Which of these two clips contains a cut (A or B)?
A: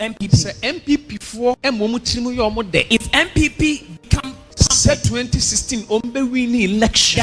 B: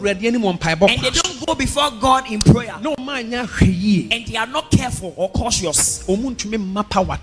A